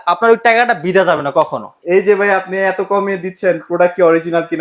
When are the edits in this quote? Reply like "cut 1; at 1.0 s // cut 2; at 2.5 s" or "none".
cut 1; at 1.7 s